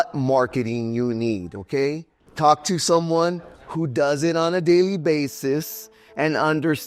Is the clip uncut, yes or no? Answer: yes